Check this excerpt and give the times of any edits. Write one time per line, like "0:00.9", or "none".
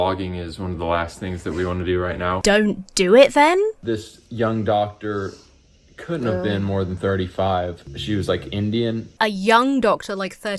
0:02.4
0:03.8
0:07.9
0:09.1